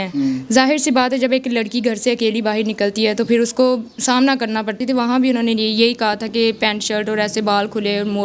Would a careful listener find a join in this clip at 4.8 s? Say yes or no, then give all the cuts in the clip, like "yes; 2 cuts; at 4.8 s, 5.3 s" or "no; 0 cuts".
yes; 1 cut; at 4.8 s